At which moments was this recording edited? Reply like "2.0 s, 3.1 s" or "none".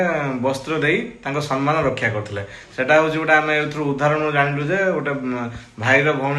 none